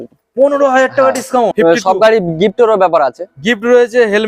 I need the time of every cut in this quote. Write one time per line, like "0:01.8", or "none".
0:01.5